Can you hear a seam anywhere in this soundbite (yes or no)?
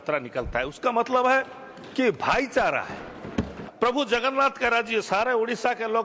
yes